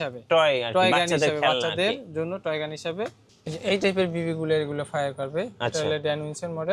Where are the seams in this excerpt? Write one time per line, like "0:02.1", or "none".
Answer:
0:03.3